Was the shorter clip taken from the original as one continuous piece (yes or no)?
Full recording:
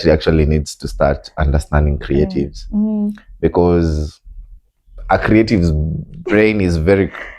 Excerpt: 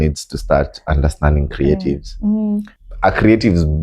no